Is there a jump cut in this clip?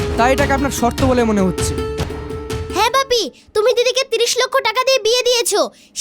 yes; 1 cut; at 2.1 s

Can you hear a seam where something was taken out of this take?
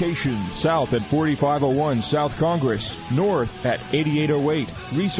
no; 0 cuts

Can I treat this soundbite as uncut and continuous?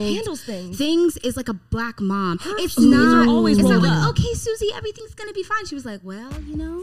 yes; 0 cuts

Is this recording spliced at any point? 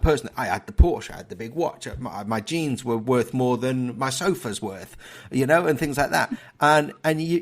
no; 0 cuts

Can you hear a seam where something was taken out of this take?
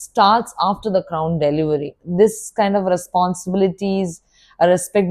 yes; 1 cut; at 2.0 s

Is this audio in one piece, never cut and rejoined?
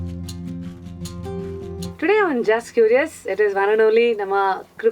no; 1 cut; at 1.9 s

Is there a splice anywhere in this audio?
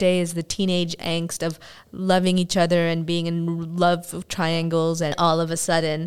yes; 1 cut; at 5.1 s

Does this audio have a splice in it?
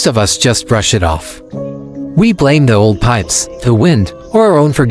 no; 0 cuts

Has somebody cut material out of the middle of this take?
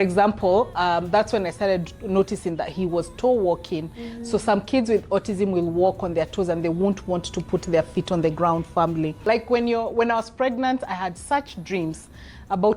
yes; 1 cut; at 9.3 s

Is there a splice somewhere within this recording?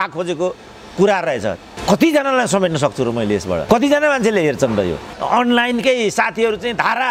yes; 2 cuts; at 1.7 s, 5.1 s

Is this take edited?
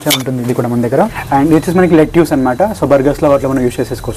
yes; 1 cut; at 1.2 s

